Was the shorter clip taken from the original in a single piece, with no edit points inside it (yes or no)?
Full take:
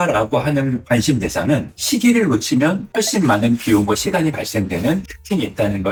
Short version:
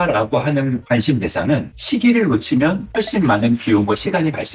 yes